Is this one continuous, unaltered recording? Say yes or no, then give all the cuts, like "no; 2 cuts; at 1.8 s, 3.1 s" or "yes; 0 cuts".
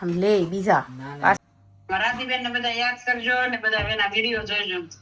no; 1 cut; at 1.4 s